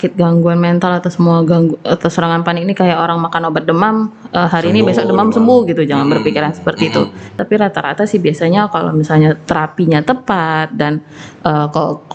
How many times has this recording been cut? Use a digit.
1